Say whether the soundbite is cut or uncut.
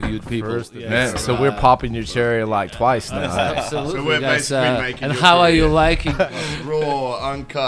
cut